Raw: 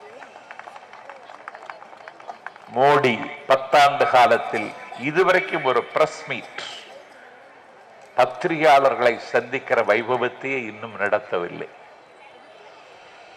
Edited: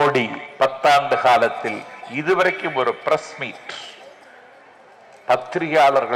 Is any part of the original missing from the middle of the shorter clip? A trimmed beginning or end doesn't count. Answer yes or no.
no